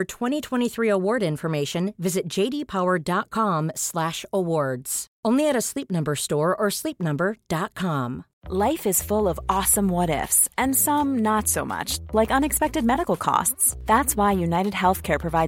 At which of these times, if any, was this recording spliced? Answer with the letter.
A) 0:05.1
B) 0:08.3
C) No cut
B